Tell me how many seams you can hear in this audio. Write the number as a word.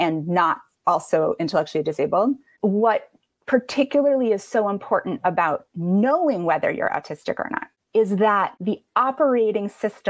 two